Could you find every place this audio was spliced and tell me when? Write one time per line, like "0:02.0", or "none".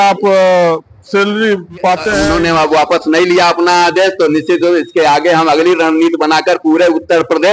0:02.2

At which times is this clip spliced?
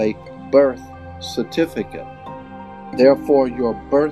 0:02.5

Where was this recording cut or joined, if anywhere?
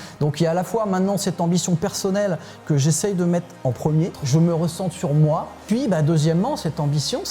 0:04.2
0:05.6

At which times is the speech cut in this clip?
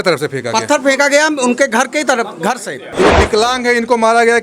0:02.9

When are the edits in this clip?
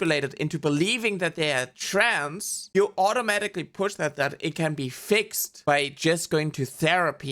none

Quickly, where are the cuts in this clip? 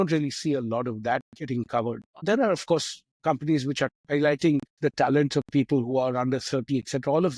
0:02.2
0:03.9

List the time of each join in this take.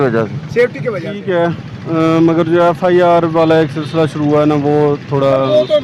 0:01.2

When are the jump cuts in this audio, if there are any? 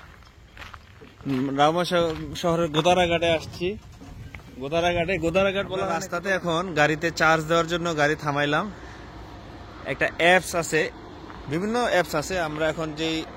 0:06.1

